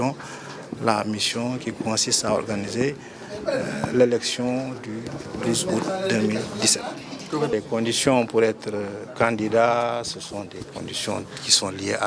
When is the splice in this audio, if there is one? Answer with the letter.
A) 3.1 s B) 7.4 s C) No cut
B